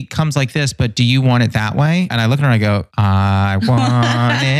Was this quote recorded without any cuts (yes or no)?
no